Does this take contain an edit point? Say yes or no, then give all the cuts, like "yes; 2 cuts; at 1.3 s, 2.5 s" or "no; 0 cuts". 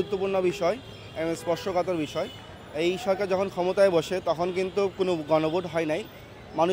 no; 0 cuts